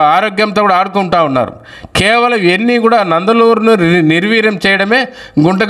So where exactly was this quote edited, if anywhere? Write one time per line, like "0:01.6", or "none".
none